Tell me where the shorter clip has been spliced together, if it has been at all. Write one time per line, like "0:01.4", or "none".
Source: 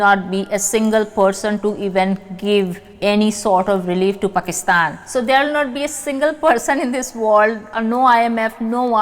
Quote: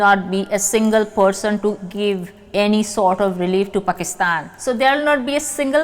0:01.8